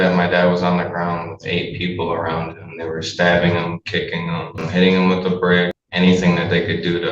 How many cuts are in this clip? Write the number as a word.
two